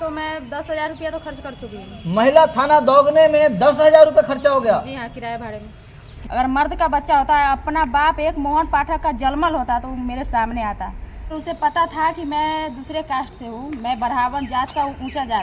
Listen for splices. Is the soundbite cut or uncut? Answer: cut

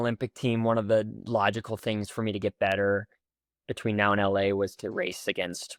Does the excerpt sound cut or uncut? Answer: uncut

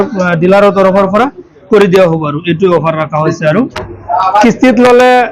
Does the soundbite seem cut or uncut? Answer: cut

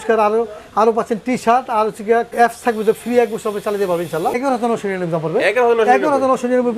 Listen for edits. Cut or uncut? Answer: cut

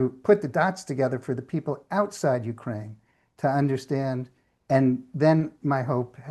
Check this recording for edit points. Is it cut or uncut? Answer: uncut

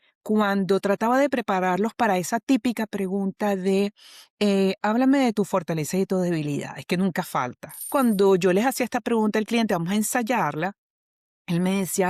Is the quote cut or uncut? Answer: cut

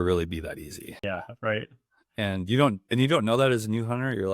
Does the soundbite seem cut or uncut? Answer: cut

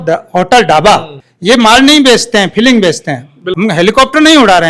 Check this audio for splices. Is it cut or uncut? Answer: cut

